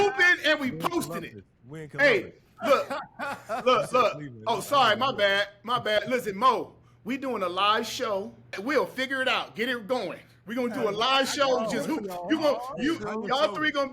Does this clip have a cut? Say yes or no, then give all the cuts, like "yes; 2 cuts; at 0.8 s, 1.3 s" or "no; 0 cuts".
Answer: yes; 1 cut; at 8.6 s